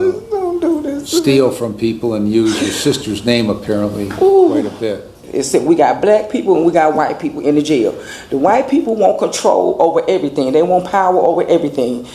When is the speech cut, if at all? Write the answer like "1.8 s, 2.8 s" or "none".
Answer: 5.2 s